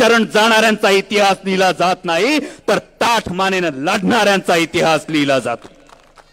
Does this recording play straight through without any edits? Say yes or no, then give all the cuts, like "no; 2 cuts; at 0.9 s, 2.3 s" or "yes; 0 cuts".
yes; 0 cuts